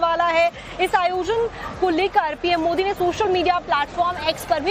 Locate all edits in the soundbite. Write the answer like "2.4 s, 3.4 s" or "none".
none